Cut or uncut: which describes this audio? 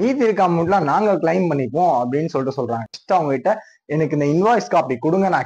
cut